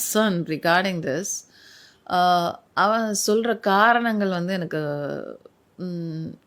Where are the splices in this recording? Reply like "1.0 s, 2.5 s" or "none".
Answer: none